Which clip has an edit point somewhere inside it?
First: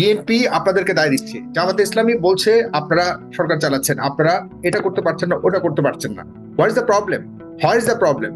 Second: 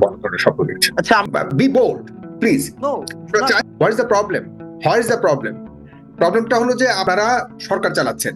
second; 3 cuts; at 1.2 s, 3.6 s, 7.0 s

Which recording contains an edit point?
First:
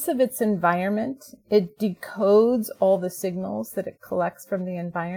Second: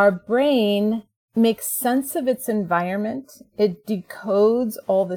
second; 1 cut; at 1.2 s

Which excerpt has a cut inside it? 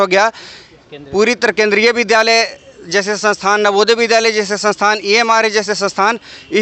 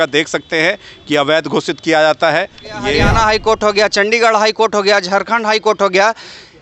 second; 1 cut; at 3.0 s

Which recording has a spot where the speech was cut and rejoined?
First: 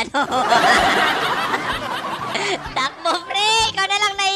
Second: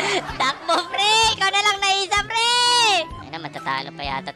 second; 1 cut; at 3.2 s

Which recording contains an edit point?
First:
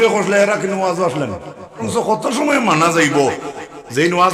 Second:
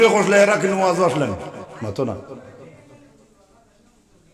first; 1 cut; at 1.9 s

